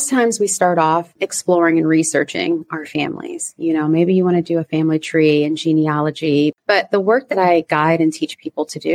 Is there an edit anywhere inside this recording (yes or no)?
yes